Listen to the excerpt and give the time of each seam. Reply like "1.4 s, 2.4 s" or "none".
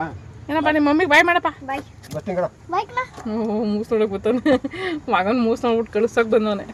none